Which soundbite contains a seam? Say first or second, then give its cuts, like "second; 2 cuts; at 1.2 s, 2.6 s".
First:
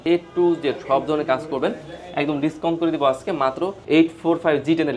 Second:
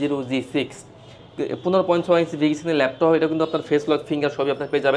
first; 1 cut; at 3.9 s